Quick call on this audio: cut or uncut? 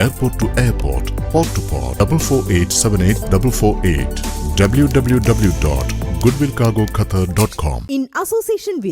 cut